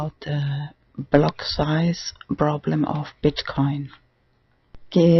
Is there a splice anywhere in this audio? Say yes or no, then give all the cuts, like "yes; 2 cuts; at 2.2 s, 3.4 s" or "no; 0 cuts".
no; 0 cuts